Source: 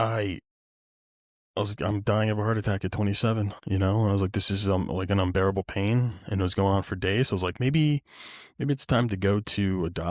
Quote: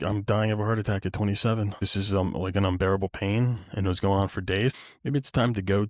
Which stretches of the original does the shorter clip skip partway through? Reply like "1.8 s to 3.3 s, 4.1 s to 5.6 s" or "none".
3.6 s to 4.4 s, 7.3 s to 8.3 s

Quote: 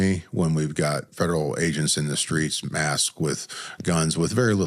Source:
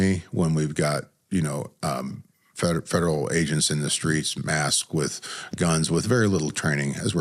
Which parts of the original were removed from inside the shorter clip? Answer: 1.1 s to 2.8 s

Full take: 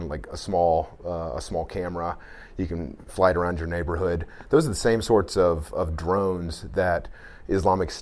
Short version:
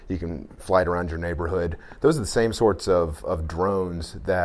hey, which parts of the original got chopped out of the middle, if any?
none

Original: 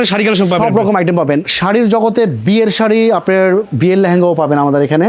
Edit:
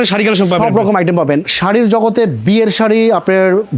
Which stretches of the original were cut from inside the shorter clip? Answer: none

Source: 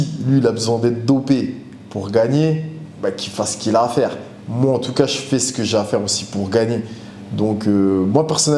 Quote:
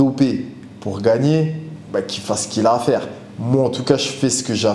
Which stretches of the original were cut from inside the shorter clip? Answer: none

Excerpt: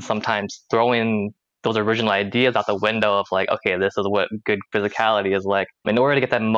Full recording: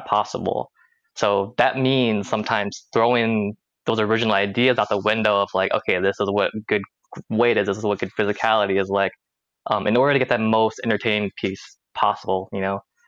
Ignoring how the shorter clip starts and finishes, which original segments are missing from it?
6.9 s to 8.1 s, 9.3 s to 9.8 s

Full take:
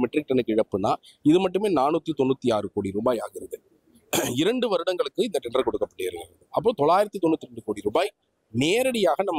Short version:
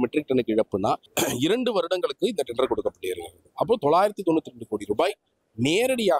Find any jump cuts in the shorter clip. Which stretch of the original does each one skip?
1.1 s to 4.0 s

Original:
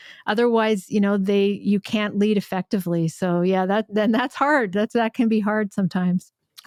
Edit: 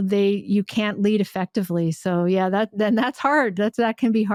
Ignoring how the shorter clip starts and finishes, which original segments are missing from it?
none

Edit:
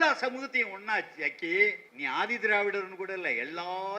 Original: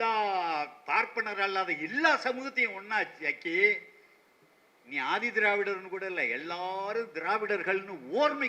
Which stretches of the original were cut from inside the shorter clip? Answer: 3.9 s to 4.8 s

